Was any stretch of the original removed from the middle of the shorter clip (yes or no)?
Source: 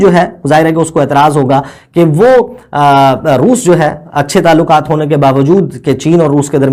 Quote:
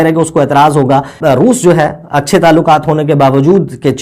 yes